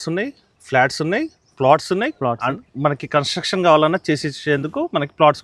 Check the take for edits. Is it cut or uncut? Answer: uncut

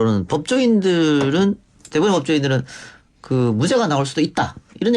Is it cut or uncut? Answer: cut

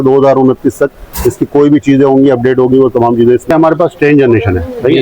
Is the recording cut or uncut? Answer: cut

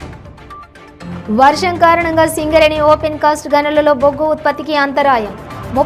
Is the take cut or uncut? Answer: uncut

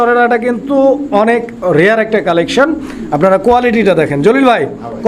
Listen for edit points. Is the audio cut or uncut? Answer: uncut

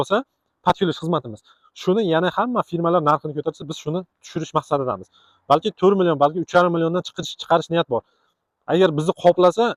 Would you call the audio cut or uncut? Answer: uncut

